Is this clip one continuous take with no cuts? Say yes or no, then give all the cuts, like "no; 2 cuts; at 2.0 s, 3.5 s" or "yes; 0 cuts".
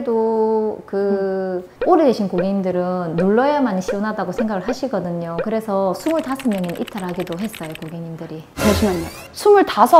no; 1 cut; at 1.7 s